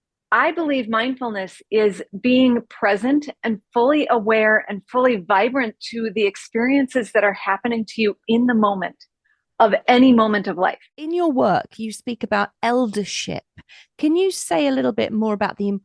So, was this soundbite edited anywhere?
yes; 1 cut; at 10.9 s

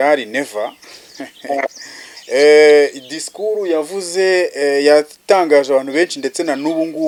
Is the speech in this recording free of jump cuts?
yes; 0 cuts

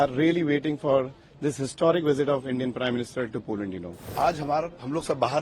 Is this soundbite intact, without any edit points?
no; 1 cut; at 4.1 s

